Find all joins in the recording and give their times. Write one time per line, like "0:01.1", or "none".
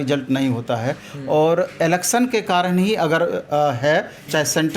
none